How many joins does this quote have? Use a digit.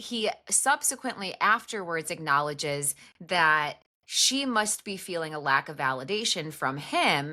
0